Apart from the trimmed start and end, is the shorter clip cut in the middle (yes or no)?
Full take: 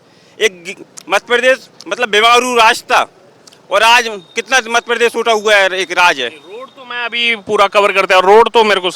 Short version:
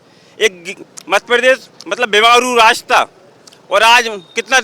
no